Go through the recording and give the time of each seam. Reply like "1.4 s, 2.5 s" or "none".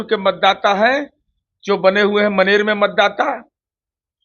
none